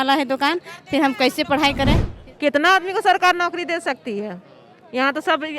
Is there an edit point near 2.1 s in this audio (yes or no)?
yes